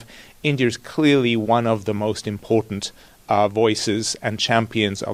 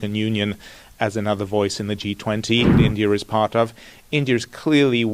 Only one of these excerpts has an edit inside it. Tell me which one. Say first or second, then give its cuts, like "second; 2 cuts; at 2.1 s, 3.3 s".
second; 1 cut; at 2.8 s